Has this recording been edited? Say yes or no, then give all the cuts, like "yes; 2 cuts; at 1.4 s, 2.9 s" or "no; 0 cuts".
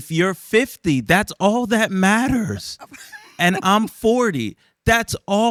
no; 0 cuts